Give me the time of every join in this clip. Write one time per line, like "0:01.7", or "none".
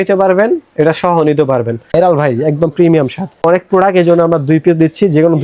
0:01.8
0:03.4

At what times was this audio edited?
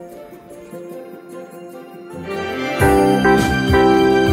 none

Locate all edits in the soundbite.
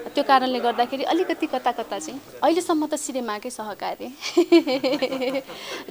0:02.2

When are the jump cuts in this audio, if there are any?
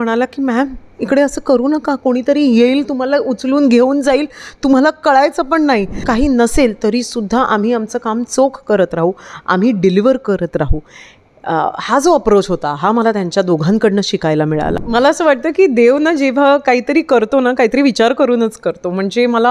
0:06.0
0:14.7

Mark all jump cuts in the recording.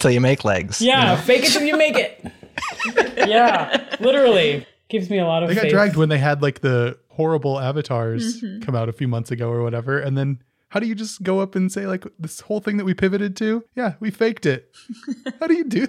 0:07.0
0:09.0
0:12.2
0:13.7

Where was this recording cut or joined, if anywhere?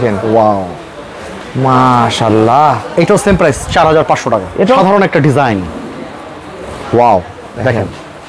0:04.8

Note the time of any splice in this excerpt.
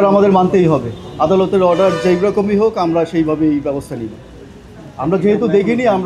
none

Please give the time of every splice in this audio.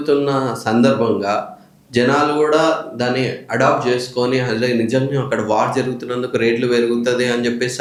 none

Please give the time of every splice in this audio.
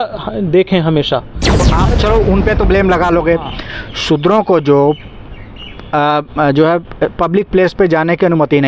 0:01.7

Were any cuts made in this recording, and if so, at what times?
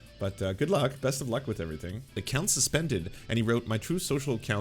0:02.2

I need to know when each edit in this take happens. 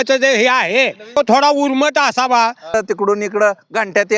0:01.2
0:02.7

